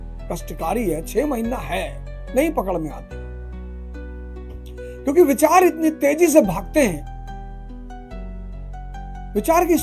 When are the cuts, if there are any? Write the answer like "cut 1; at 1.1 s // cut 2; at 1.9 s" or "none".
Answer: cut 1; at 3.0 s // cut 2; at 5.0 s // cut 3; at 7.0 s // cut 4; at 8.8 s